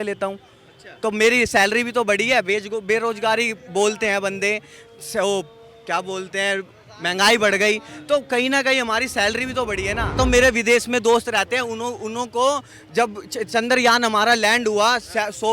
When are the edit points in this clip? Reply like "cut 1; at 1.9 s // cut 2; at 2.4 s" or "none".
cut 1; at 10.1 s